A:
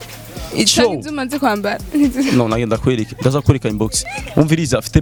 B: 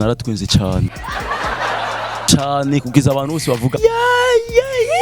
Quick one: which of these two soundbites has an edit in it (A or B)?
B